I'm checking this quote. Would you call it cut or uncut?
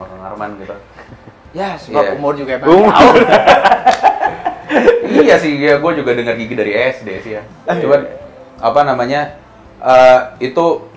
uncut